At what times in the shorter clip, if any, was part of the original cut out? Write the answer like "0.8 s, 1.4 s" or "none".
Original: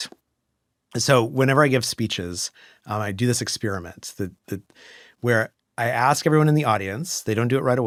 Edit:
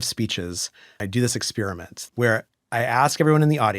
1.0 s, 1.9 s

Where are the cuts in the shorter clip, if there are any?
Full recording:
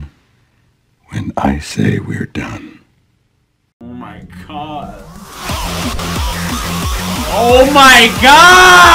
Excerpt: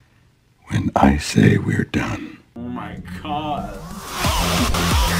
2.4 s

